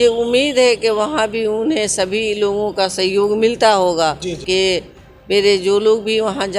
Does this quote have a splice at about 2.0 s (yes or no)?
no